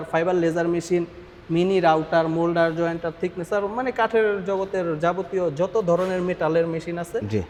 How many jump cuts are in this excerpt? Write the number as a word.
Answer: zero